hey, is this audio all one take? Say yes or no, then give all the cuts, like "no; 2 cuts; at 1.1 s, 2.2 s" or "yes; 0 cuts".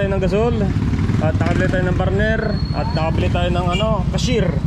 yes; 0 cuts